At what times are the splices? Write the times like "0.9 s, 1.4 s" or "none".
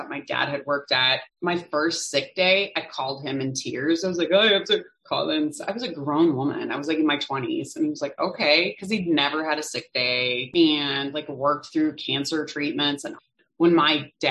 1.2 s, 10.5 s, 13.2 s